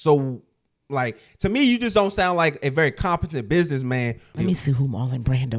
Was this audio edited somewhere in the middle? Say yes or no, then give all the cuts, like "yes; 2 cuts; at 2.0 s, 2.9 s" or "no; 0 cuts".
yes; 1 cut; at 4.3 s